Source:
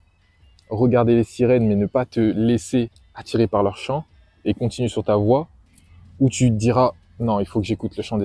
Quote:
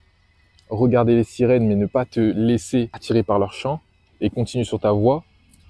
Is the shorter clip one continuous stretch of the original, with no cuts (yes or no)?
no